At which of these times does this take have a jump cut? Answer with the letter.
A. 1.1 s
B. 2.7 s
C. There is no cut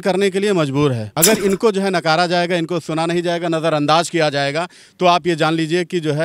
A